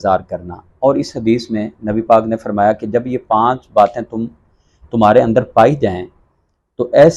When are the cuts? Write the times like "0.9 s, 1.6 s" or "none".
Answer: none